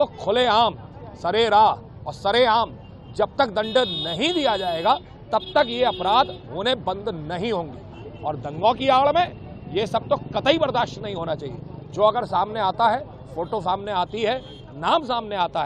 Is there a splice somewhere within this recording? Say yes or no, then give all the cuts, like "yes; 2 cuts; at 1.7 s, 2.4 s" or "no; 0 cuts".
no; 0 cuts